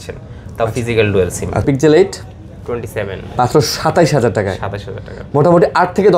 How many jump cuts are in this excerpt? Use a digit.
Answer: 1